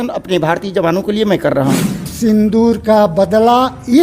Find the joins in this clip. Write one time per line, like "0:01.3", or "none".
0:02.1